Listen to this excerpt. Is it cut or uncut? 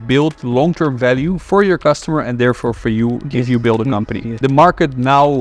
cut